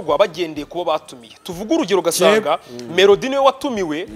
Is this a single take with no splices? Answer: yes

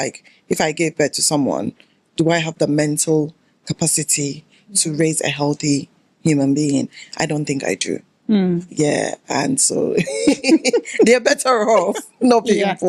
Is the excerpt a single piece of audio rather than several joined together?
yes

